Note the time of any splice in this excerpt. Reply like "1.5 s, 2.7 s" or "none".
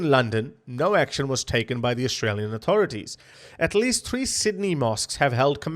3.3 s